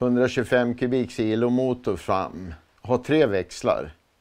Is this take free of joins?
no; 1 cut; at 2.7 s

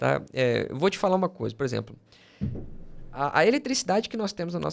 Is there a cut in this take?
no; 0 cuts

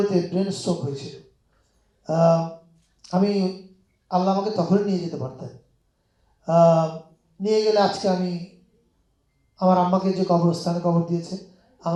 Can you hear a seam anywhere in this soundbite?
no; 0 cuts

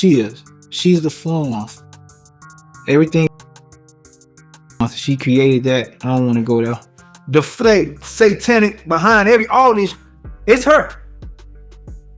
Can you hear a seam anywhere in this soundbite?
yes; 2 cuts; at 3.3 s, 4.8 s

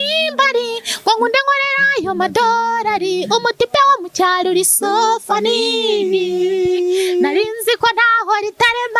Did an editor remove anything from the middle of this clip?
no; 0 cuts

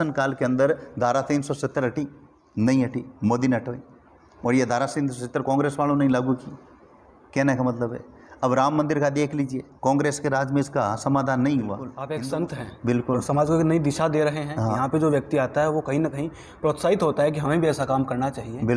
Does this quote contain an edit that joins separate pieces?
yes; 1 cut; at 12.0 s

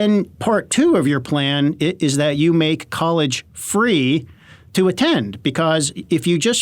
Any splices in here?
no; 0 cuts

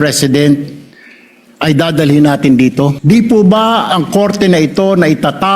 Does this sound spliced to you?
yes; 1 cut; at 3.0 s

